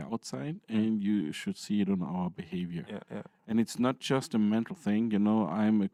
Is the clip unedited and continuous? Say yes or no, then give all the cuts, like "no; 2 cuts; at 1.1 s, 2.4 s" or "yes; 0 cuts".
yes; 0 cuts